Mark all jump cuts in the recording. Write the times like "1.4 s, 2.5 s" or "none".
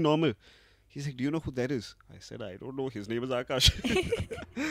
none